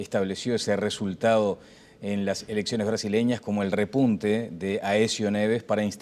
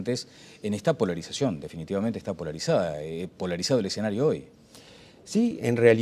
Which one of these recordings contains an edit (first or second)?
second